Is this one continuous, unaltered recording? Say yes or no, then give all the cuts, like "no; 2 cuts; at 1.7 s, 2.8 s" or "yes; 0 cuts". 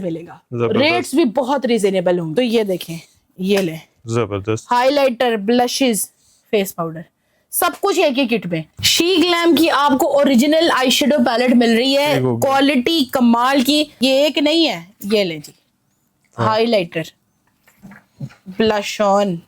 no; 3 cuts; at 2.3 s, 8.8 s, 13.9 s